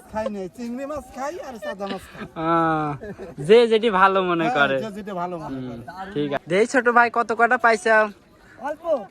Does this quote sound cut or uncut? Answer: cut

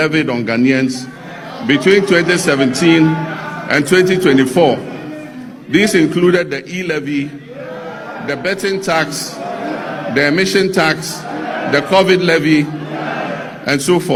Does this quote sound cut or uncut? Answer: uncut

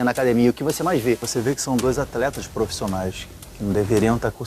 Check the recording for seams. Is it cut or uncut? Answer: cut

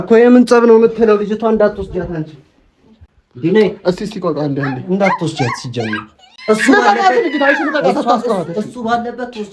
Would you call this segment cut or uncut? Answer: uncut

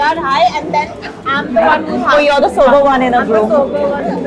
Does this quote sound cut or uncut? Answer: uncut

